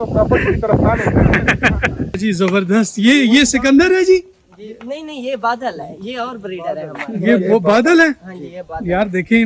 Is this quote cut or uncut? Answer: cut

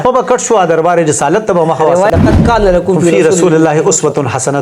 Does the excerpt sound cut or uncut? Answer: cut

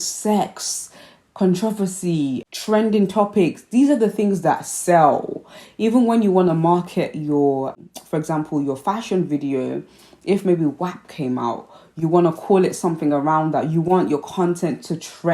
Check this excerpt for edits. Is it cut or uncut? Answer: uncut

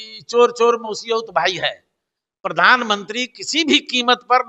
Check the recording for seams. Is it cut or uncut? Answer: uncut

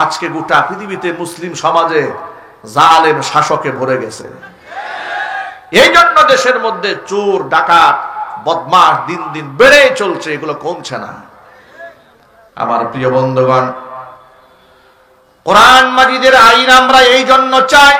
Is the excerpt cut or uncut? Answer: uncut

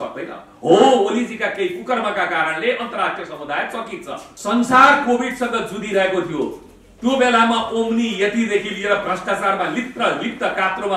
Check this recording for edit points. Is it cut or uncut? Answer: cut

